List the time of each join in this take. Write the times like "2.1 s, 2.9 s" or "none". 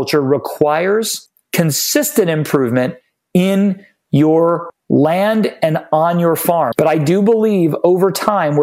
6.7 s